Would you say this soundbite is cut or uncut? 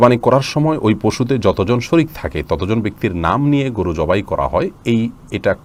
uncut